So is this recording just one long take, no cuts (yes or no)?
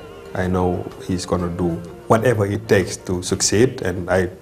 no